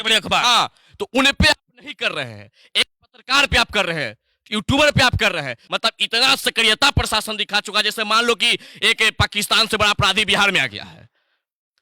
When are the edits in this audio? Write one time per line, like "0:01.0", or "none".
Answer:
0:05.6

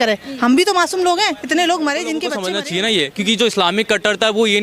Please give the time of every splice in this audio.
0:02.4

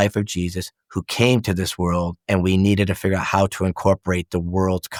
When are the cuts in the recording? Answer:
none

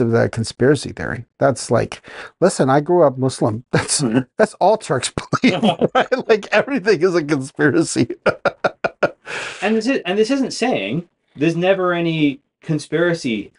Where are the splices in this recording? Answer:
none

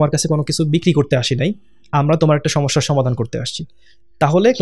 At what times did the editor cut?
none

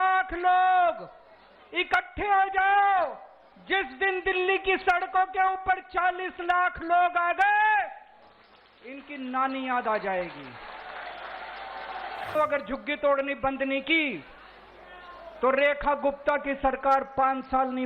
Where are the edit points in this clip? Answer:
0:12.3

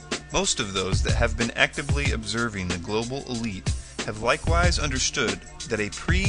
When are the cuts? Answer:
none

